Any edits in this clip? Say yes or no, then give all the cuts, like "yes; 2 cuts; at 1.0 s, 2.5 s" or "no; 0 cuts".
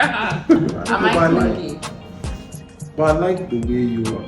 yes; 1 cut; at 0.9 s